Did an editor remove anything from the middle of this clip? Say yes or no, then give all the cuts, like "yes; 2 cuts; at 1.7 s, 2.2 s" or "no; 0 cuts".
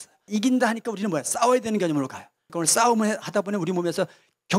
no; 0 cuts